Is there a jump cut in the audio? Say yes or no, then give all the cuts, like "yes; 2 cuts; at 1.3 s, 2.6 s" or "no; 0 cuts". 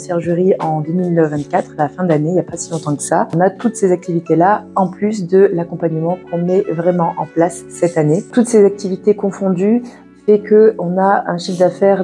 yes; 2 cuts; at 3.3 s, 8.3 s